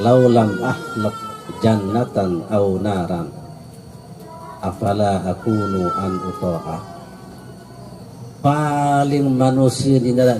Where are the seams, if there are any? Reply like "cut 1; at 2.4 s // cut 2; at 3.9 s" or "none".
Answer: cut 1; at 8.0 s